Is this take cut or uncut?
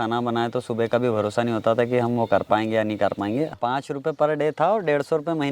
cut